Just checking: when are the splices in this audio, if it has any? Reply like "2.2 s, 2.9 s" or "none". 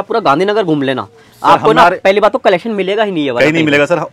none